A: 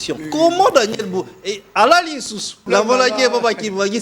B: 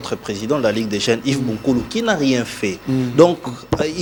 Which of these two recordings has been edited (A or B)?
A